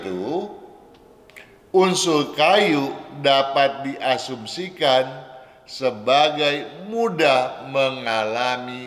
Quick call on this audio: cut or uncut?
uncut